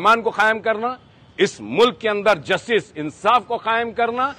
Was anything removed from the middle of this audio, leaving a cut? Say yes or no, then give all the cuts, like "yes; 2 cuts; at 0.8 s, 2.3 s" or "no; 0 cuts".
no; 0 cuts